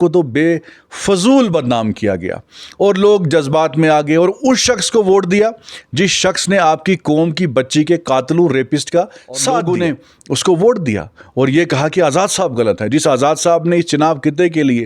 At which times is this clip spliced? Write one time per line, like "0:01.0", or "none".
0:09.6